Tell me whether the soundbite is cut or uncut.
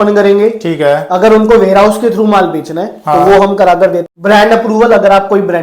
cut